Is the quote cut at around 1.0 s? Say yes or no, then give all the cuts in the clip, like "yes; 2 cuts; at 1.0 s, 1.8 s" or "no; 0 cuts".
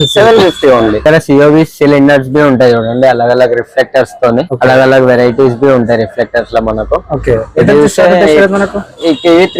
yes; 1 cut; at 1.0 s